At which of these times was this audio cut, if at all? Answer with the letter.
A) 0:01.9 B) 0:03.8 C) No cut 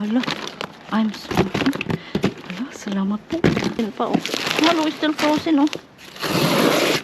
B